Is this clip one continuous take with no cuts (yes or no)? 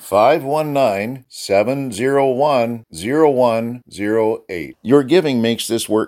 yes